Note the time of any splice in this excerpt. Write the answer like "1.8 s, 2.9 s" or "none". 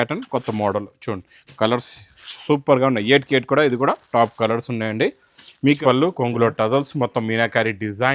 5.8 s